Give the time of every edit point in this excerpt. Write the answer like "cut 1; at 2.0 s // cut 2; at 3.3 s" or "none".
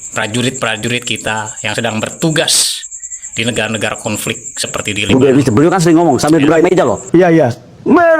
cut 1; at 5.1 s